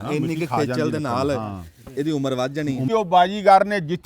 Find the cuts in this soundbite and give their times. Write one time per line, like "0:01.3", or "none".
0:02.9